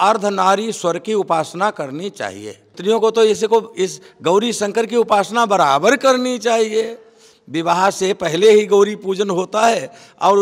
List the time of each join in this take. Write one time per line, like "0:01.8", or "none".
0:02.8